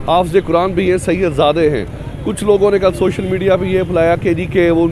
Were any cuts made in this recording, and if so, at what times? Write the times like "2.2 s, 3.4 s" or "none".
none